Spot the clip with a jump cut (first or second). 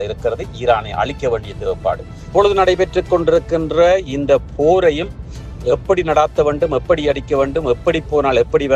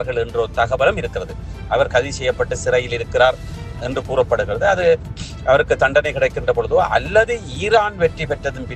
first